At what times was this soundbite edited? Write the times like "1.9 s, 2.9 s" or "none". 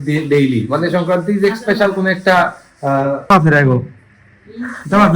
3.3 s